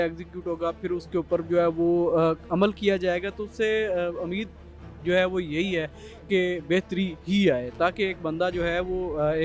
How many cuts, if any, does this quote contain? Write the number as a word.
zero